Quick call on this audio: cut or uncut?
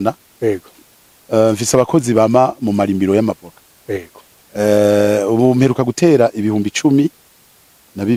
uncut